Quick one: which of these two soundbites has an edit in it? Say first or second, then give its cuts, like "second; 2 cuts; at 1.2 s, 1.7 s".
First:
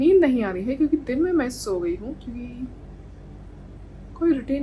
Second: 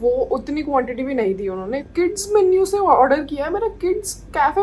second; 1 cut; at 1.8 s